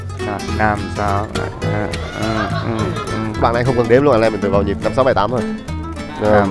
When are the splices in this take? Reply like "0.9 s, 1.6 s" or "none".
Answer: none